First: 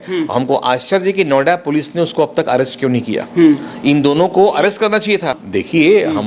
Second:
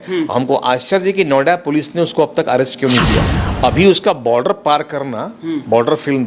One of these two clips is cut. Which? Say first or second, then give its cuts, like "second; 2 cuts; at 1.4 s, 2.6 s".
second; 1 cut; at 3.3 s